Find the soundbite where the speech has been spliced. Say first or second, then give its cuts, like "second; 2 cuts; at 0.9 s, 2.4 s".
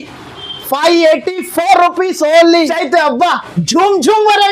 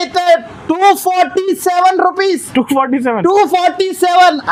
first; 1 cut; at 2.6 s